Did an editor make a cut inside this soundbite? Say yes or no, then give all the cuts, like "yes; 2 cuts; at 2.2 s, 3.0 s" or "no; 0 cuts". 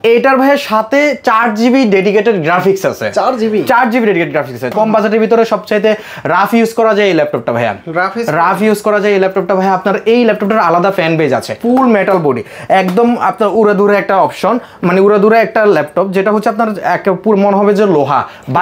yes; 2 cuts; at 4.6 s, 11.5 s